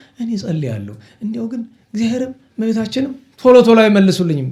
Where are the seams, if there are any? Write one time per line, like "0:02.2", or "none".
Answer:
none